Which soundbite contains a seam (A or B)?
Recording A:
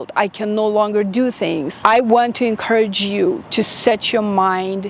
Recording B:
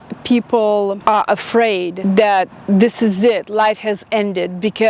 B